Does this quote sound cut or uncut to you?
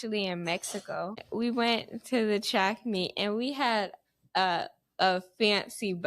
cut